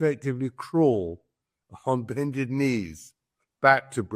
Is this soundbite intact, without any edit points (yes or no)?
yes